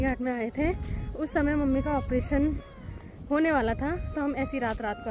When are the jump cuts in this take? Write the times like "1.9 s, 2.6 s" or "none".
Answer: none